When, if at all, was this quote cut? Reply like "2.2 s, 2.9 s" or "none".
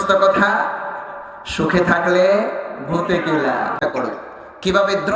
3.8 s